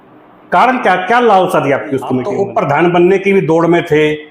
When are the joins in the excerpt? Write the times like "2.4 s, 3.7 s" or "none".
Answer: 2.2 s

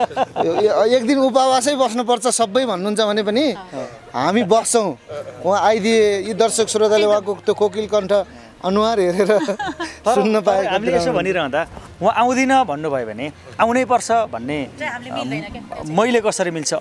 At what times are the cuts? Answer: none

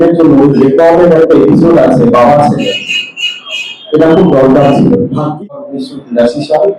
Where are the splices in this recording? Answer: 5.3 s

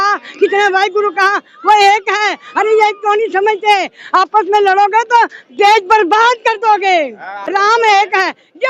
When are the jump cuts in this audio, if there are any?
7.3 s

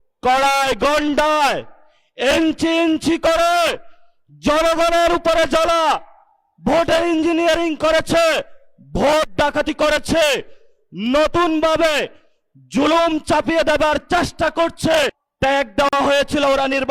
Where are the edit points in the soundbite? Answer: 15.8 s

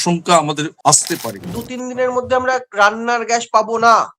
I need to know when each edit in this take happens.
1.1 s

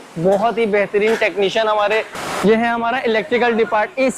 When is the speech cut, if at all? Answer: 2.1 s

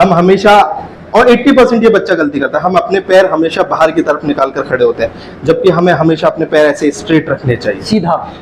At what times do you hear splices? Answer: none

